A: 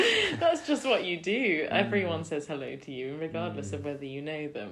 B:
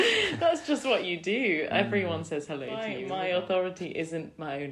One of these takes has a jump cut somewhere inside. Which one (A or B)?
B